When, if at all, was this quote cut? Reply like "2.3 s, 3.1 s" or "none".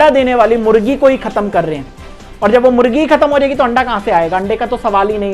none